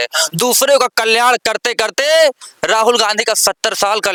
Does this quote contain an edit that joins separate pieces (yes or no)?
no